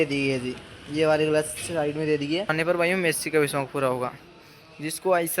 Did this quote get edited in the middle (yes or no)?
yes